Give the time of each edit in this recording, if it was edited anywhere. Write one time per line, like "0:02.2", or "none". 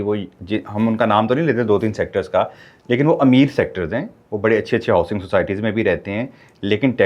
none